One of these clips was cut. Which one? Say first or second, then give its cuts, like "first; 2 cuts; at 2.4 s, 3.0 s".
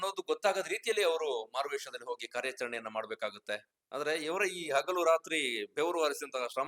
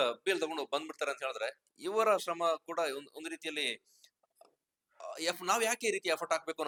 first; 1 cut; at 3.7 s